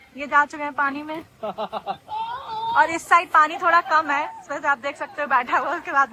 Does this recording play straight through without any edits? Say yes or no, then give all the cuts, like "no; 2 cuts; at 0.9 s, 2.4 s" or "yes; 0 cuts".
yes; 0 cuts